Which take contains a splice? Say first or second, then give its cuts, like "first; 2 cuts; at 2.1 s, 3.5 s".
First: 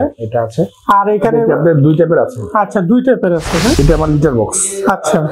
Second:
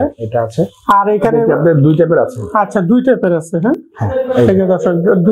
first; 1 cut; at 3.8 s